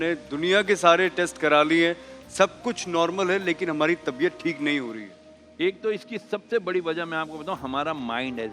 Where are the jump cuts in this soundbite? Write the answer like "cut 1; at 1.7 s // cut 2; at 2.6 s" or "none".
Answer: none